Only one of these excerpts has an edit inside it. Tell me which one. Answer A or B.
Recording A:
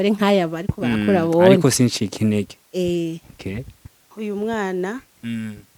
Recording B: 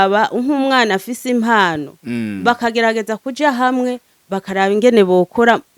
A